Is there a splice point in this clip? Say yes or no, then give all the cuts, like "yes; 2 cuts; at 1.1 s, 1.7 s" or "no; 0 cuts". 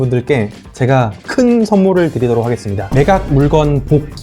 yes; 1 cut; at 2.8 s